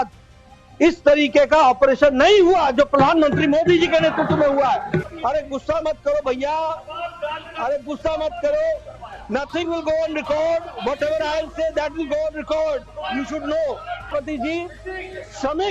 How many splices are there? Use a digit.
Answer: 2